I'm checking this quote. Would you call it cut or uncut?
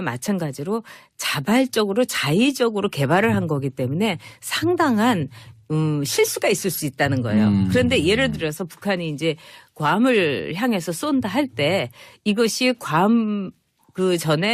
uncut